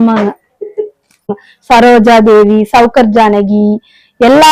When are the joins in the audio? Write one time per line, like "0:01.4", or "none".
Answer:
0:01.4